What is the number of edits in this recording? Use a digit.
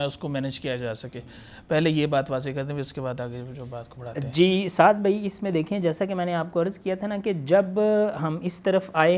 0